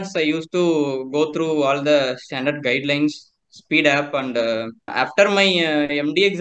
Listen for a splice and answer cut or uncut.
cut